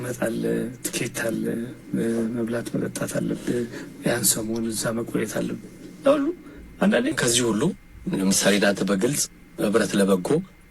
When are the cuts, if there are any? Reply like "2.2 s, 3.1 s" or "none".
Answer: 7.2 s